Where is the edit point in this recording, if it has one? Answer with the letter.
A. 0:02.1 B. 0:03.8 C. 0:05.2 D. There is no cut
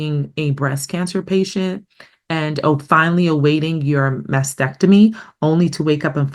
D